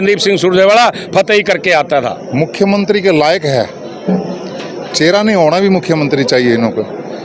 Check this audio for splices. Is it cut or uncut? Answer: cut